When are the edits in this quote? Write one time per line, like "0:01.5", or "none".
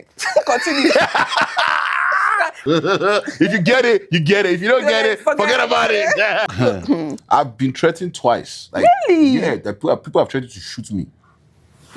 0:02.6
0:06.5